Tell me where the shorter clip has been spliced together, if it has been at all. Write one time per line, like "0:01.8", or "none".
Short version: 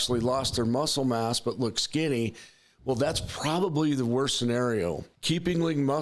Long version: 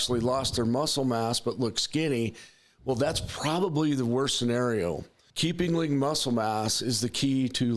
0:05.1